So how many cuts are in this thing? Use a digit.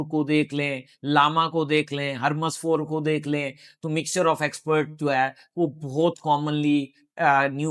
0